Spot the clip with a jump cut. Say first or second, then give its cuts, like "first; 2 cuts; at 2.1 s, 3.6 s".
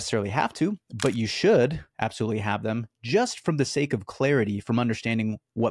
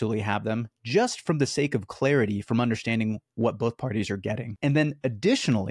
second; 1 cut; at 4.5 s